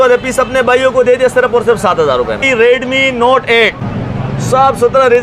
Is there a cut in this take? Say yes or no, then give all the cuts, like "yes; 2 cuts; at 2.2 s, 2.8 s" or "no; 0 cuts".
yes; 2 cuts; at 2.5 s, 3.8 s